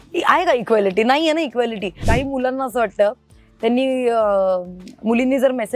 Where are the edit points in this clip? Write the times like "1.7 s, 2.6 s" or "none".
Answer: 2.0 s